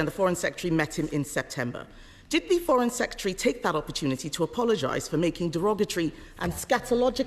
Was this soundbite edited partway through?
no; 0 cuts

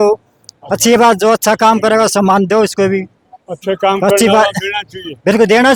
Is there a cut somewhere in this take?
no; 0 cuts

